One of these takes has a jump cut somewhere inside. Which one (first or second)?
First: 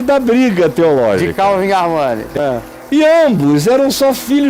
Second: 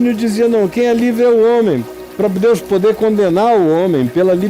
first